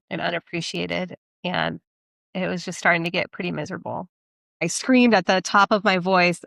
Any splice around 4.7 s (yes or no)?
yes